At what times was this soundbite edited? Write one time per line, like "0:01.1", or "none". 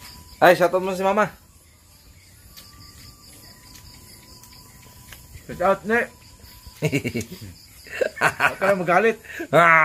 none